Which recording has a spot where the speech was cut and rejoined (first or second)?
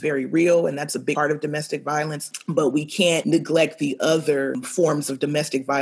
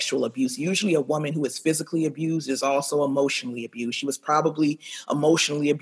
first